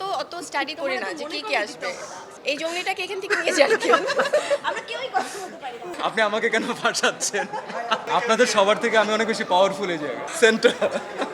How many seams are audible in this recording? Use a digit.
2